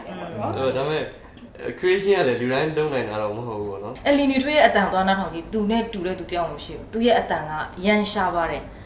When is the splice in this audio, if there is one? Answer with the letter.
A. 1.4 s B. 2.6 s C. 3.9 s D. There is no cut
C